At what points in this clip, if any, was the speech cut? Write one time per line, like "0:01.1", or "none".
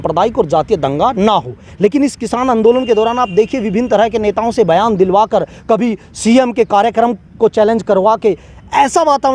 none